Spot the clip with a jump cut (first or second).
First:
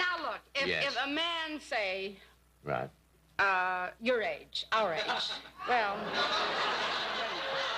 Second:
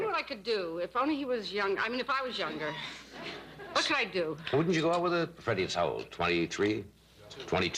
second